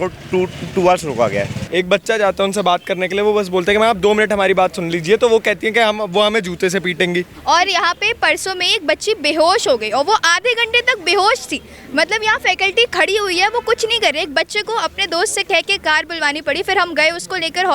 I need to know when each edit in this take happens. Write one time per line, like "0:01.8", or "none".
0:01.6
0:07.3